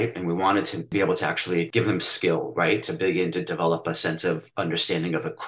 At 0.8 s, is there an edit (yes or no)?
yes